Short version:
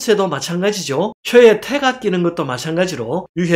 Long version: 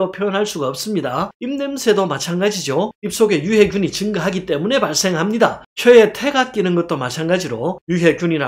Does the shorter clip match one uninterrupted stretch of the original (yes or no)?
no